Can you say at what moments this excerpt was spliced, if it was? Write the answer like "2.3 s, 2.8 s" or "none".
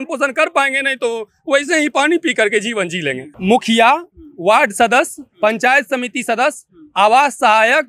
3.3 s